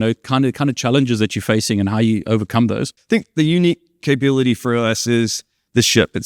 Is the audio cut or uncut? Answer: cut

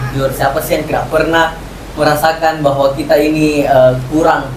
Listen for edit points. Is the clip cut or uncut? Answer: uncut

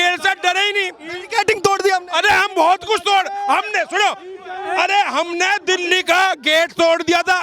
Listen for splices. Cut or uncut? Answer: uncut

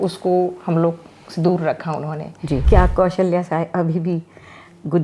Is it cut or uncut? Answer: cut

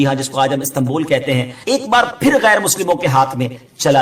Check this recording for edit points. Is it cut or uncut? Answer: cut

